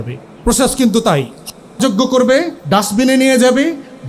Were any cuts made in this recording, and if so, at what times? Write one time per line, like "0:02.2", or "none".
0:01.8
0:02.6